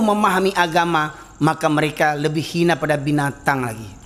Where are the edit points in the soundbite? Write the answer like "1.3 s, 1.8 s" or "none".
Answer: none